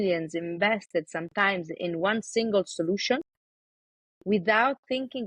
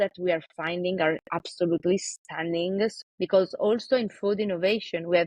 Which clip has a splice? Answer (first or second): second